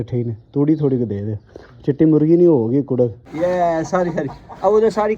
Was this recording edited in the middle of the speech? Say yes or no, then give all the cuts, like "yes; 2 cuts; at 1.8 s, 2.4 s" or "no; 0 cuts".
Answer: yes; 1 cut; at 3.3 s